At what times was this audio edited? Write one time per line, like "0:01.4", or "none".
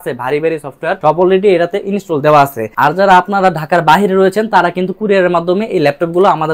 0:01.0
0:02.6